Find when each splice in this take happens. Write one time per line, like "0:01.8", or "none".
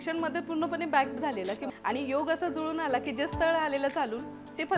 0:01.7